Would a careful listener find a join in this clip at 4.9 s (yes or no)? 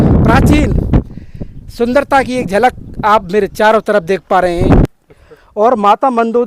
yes